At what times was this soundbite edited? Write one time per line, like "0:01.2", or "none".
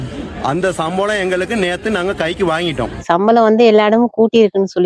0:03.0